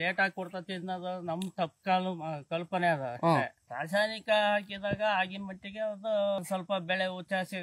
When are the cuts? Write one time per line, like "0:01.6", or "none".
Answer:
0:03.6
0:06.4